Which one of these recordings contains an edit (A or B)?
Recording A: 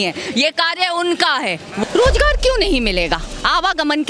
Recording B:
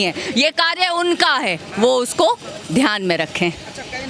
A